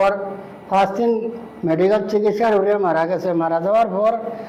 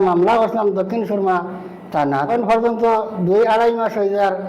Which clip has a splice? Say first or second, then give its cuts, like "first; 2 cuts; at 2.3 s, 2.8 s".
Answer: second; 1 cut; at 2.3 s